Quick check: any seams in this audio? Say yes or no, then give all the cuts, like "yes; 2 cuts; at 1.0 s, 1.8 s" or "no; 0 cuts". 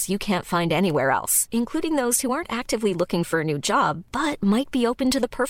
no; 0 cuts